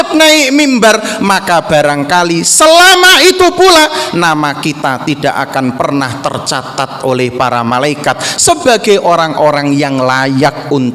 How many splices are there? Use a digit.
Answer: 0